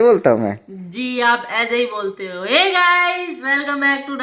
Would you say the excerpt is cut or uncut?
uncut